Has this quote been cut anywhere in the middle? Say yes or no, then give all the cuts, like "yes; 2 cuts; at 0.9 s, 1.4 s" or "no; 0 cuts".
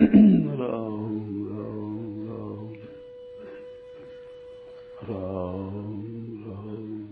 yes; 2 cuts; at 2.7 s, 4.8 s